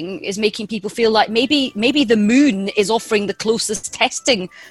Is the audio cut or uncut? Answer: uncut